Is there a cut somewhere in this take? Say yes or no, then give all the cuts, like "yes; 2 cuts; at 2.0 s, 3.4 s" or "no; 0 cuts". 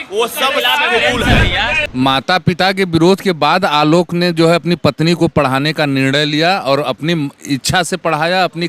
yes; 1 cut; at 1.8 s